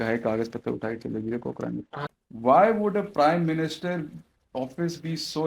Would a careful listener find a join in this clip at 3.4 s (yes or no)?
no